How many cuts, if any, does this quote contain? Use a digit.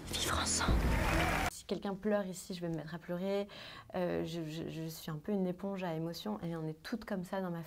1